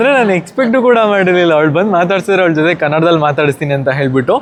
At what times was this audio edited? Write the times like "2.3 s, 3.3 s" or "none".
none